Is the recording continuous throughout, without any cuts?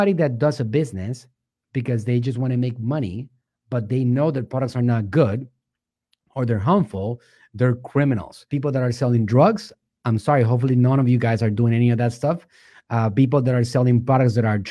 yes; 0 cuts

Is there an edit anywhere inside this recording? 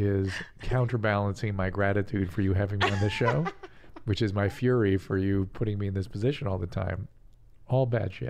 yes; 1 cut; at 7.1 s

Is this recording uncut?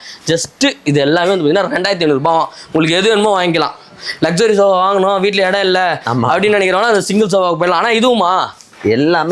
yes; 0 cuts

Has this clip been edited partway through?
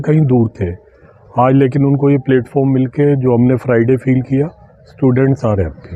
no; 0 cuts

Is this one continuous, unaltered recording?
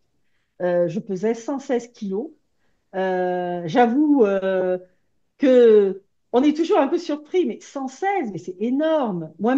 yes; 0 cuts

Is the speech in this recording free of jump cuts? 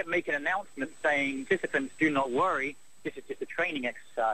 no; 1 cut; at 1.5 s

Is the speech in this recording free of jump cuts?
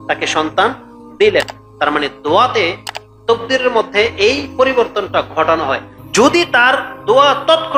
no; 1 cut; at 5.9 s

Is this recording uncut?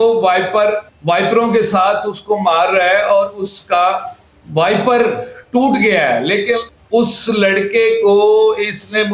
yes; 0 cuts

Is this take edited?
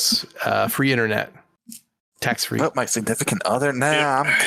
no; 0 cuts

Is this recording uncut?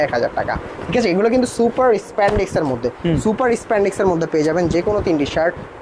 yes; 0 cuts

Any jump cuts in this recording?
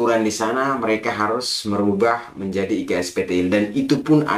no; 0 cuts

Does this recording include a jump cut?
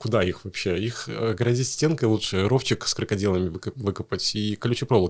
no; 0 cuts

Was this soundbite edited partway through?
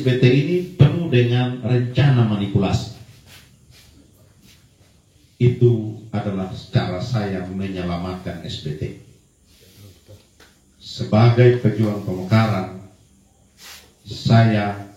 yes; 1 cut; at 5.0 s

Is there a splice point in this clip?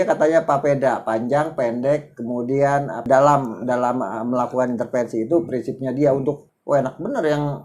yes; 2 cuts; at 3.0 s, 6.5 s

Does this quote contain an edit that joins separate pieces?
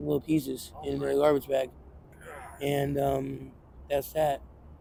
no; 0 cuts

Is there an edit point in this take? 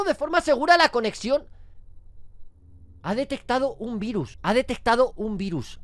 no; 0 cuts

